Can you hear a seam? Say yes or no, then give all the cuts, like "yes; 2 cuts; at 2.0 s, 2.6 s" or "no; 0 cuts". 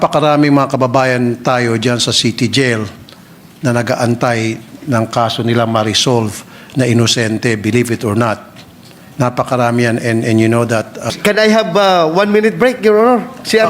yes; 1 cut; at 11.1 s